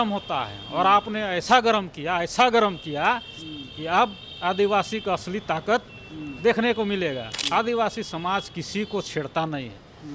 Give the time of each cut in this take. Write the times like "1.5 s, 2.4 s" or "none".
7.3 s